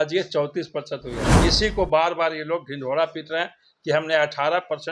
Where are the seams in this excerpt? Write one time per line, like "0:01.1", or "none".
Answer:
0:01.3